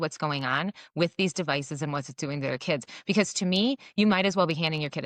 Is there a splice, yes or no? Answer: no